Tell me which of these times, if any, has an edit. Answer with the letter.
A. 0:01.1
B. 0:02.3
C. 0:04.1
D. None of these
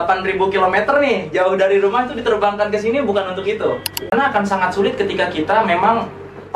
C